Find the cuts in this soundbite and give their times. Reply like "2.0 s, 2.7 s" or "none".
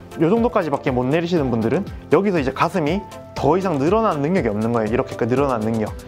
none

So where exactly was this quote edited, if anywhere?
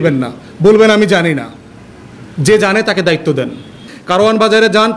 3.9 s

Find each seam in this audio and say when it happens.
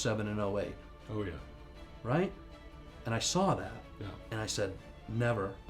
none

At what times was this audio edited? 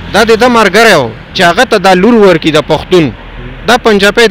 none

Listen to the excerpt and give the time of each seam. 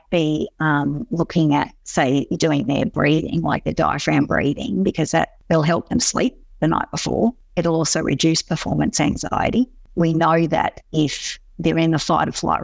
5.4 s, 7.4 s, 9.9 s

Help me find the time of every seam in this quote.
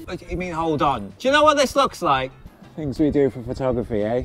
2.3 s

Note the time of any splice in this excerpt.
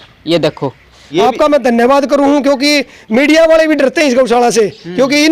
1.1 s

